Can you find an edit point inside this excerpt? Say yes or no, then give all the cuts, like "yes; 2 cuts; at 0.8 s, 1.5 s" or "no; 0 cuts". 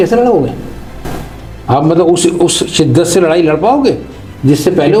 no; 0 cuts